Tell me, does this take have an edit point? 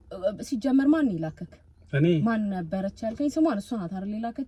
no; 0 cuts

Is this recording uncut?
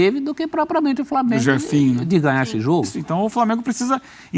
no; 1 cut; at 3.0 s

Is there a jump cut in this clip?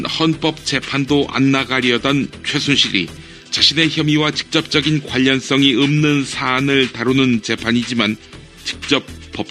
yes; 1 cut; at 6.1 s

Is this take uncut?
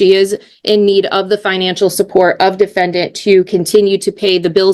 yes; 0 cuts

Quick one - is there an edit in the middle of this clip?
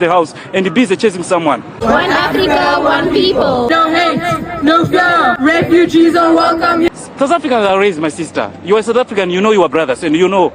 yes; 2 cuts; at 1.8 s, 6.9 s

